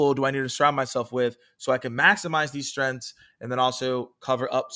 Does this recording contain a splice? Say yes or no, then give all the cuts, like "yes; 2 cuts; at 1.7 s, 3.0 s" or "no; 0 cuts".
no; 0 cuts